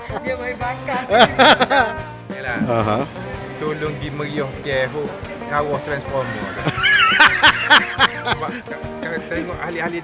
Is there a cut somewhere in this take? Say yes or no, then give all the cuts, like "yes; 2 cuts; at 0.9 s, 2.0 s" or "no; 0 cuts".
yes; 1 cut; at 2.3 s